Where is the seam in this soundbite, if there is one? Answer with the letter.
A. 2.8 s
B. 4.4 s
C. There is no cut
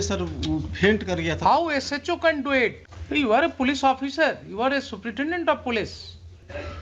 A